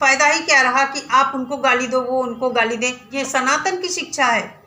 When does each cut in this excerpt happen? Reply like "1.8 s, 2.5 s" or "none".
3.1 s